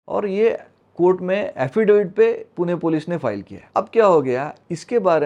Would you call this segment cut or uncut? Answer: cut